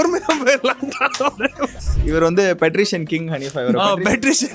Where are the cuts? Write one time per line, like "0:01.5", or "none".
0:01.8